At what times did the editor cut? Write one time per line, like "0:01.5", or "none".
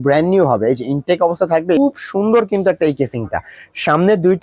0:01.8